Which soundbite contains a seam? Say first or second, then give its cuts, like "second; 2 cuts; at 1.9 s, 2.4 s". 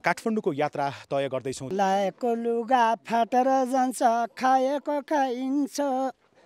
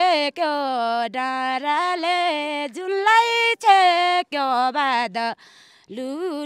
first; 1 cut; at 1.6 s